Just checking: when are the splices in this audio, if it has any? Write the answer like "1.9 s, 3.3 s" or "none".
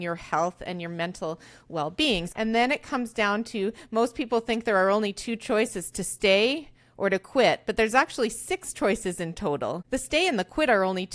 2.3 s